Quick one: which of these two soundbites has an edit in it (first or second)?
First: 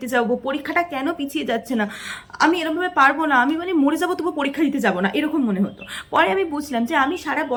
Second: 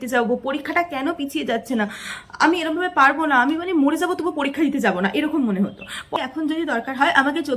second